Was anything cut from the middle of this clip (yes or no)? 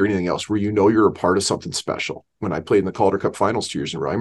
yes